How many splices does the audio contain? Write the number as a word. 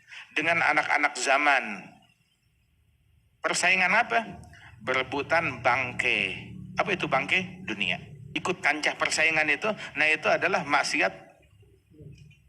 one